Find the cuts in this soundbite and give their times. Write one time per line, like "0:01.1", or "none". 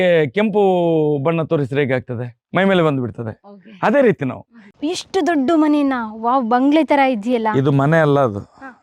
0:04.6